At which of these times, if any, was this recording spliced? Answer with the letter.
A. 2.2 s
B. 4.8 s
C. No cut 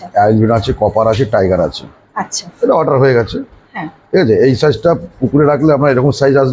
C